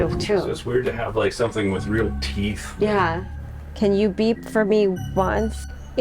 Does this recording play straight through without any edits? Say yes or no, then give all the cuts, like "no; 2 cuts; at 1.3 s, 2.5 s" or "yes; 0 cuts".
no; 1 cut; at 3.3 s